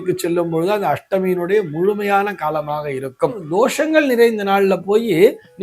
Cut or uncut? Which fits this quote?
cut